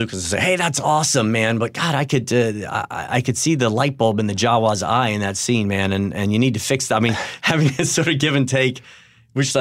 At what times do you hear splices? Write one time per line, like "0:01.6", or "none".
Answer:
none